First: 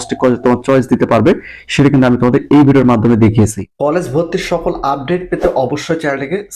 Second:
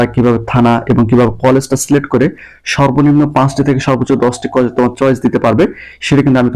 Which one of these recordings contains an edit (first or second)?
first